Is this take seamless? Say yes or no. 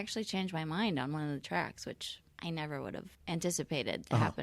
no